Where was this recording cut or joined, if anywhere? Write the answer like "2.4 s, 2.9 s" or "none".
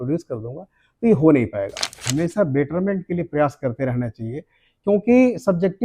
2.1 s